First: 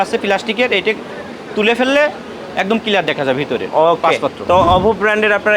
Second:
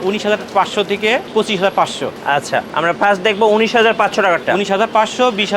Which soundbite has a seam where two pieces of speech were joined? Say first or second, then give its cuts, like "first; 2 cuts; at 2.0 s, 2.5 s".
second; 2 cuts; at 1.3 s, 2.3 s